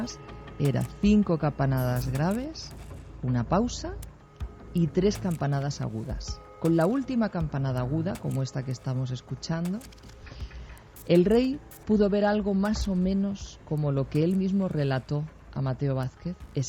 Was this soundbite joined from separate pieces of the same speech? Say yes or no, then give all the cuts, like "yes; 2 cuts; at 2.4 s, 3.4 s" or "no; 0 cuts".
no; 0 cuts